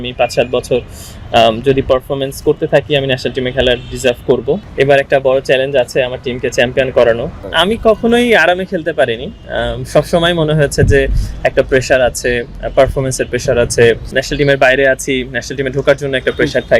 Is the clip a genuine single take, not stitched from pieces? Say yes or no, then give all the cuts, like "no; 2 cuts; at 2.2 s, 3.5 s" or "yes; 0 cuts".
no; 3 cuts; at 4.6 s, 7.4 s, 14.2 s